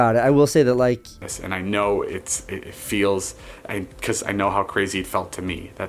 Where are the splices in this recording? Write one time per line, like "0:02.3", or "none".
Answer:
0:01.2